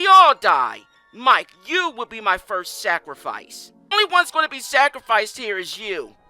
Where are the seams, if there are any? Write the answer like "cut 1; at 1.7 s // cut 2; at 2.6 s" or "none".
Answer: cut 1; at 3.9 s